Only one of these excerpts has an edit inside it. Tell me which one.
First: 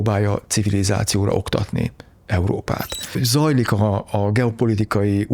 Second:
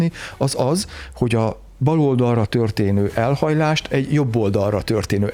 first; 1 cut; at 3.1 s

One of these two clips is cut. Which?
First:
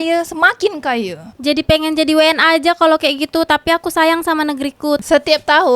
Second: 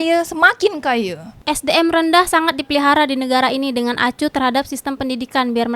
first; 2 cuts; at 1.3 s, 5.0 s

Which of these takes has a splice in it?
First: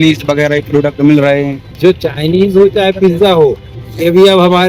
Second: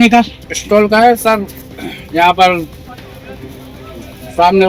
first; 1 cut; at 1.6 s

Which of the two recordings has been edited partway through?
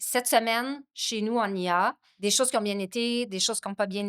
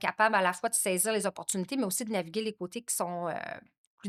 first; 1 cut; at 2.1 s

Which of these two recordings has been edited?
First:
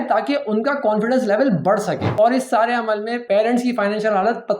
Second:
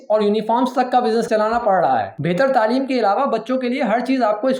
first; 2 cuts; at 2.0 s, 3.2 s

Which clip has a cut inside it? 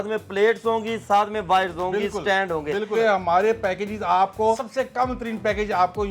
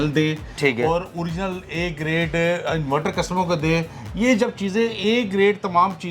first; 2 cuts; at 2.9 s, 4.7 s

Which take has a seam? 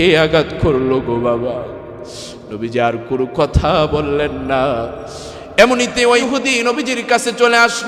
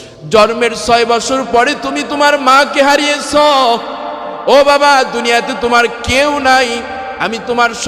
first; 1 cut; at 6.2 s

